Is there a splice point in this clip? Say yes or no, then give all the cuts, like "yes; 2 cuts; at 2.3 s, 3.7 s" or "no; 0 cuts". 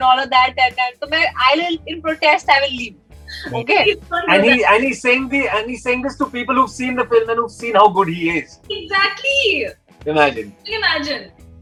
no; 0 cuts